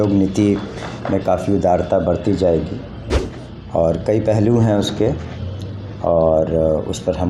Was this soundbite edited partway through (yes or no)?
no